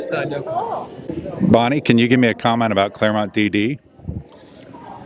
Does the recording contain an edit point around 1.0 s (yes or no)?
yes